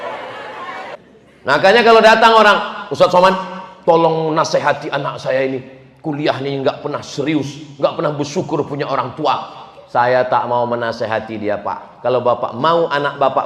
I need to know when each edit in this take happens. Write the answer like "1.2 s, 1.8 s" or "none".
1.0 s